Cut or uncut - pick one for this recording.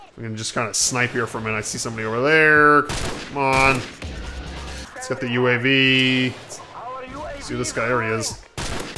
cut